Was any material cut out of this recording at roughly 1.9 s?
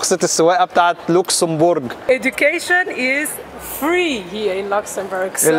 yes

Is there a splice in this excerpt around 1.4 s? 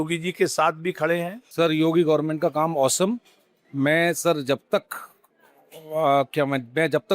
yes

